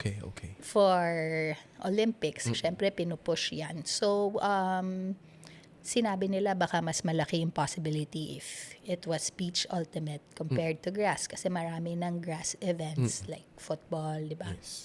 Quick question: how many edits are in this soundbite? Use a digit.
0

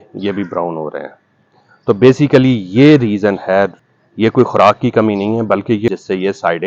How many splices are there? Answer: 2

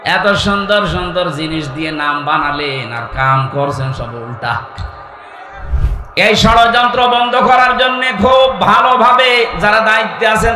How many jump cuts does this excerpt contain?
1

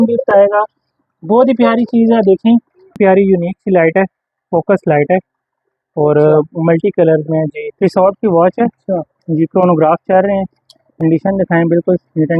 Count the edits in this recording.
2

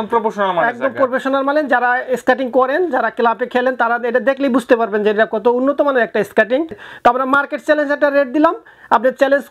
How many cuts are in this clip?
1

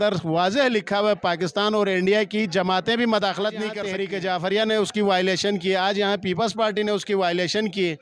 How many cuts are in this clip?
1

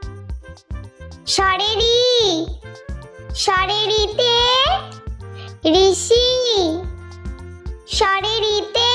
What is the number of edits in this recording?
0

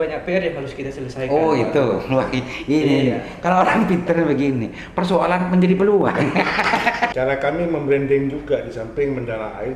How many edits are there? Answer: 1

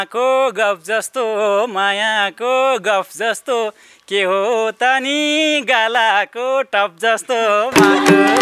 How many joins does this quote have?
0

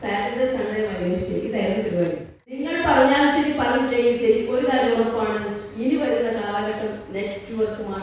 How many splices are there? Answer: 1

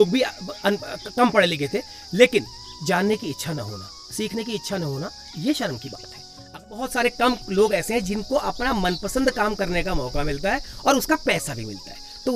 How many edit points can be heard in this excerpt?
1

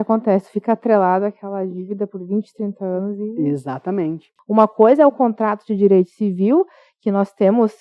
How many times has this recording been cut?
1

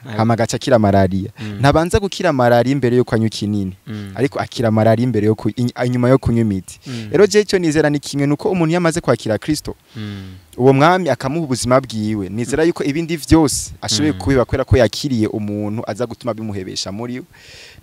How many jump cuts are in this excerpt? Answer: 0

